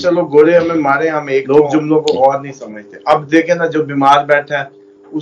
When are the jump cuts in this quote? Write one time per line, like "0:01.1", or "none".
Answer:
0:01.4